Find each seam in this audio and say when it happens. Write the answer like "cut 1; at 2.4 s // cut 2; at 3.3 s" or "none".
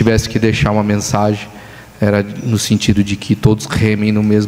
none

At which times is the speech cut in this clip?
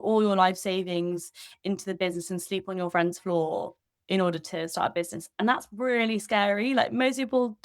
none

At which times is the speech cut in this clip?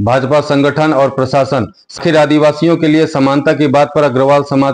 cut 1; at 2.0 s

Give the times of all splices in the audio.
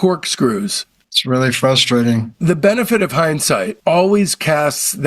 cut 1; at 2.3 s // cut 2; at 3.7 s

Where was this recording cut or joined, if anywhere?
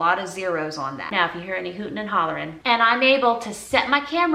none

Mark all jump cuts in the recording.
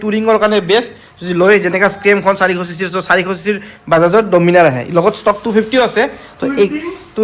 none

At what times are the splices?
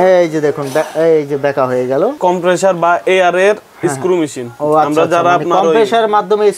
cut 1; at 2.2 s

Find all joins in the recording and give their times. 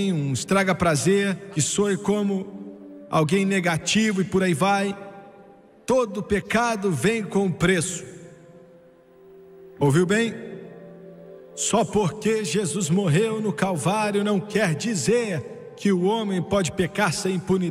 none

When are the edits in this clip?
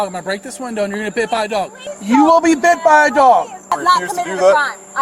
cut 1; at 3.7 s

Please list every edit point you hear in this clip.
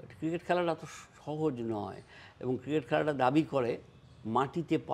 none

